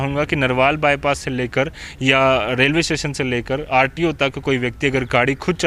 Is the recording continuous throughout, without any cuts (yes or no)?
yes